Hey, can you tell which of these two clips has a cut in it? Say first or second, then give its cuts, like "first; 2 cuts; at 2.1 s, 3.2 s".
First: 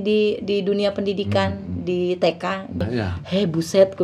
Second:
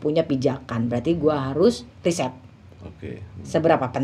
first; 1 cut; at 2.8 s